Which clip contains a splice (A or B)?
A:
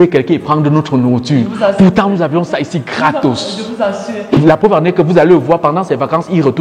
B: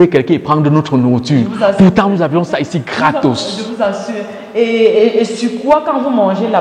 A